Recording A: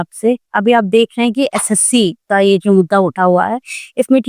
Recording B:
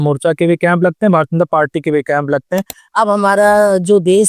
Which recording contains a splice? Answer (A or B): B